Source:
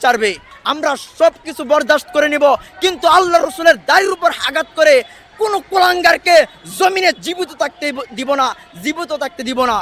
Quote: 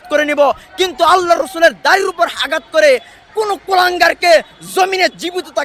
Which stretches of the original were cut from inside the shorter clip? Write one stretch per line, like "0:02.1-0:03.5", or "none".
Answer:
none